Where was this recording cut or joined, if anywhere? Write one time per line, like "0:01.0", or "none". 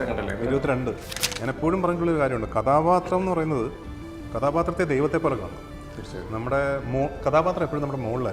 0:01.1